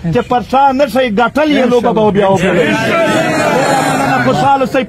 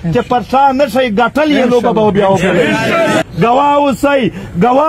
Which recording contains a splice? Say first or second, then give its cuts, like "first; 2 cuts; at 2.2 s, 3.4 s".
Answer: second; 1 cut; at 3.3 s